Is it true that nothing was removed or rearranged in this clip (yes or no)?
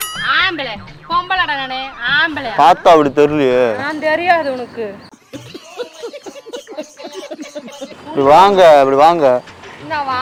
yes